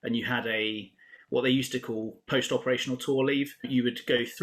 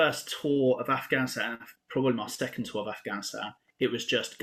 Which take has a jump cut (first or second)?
first